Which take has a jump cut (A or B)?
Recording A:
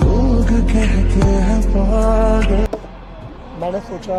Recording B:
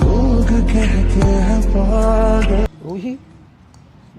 B